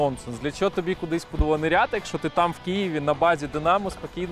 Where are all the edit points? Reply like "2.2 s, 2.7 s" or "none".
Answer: none